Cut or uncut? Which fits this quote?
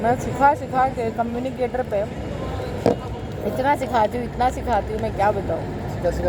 uncut